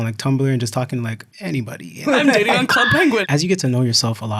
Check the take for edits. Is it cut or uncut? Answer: cut